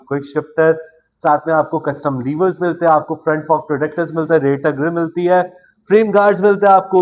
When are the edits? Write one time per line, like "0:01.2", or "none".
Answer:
none